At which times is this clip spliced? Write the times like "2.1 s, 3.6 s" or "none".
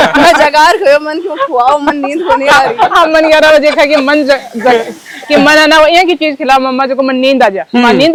none